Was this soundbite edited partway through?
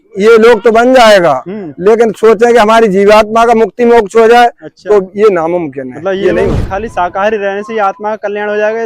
yes; 1 cut; at 6.6 s

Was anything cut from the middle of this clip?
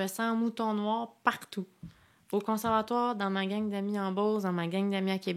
no; 0 cuts

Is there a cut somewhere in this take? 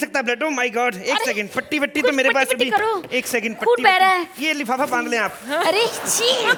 no; 0 cuts

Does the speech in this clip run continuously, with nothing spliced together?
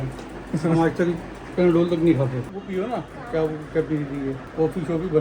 no; 1 cut; at 2.4 s

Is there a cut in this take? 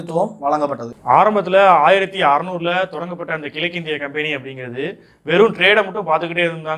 yes; 1 cut; at 0.9 s

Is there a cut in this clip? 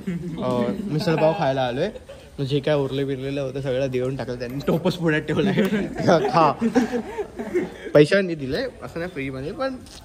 no; 0 cuts

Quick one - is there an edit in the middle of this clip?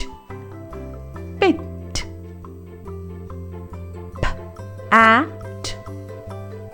no; 0 cuts

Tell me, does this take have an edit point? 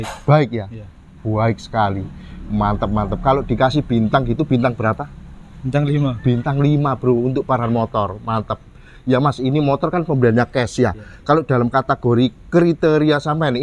no; 0 cuts

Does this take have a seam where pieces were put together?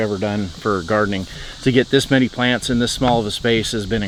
no; 0 cuts

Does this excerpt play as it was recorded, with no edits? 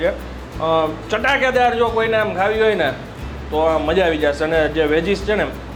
yes; 0 cuts

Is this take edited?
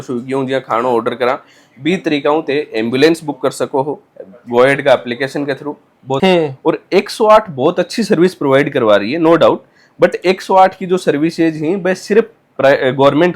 yes; 1 cut; at 6.2 s

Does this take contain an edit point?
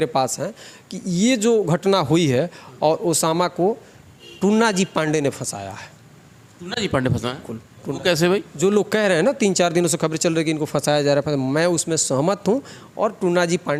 no; 0 cuts

